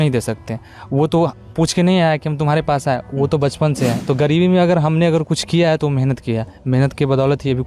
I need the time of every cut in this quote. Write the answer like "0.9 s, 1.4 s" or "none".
4.0 s